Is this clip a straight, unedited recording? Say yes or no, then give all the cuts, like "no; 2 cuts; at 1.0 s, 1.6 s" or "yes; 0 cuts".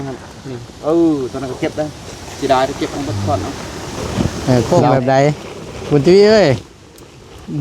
no; 1 cut; at 4.0 s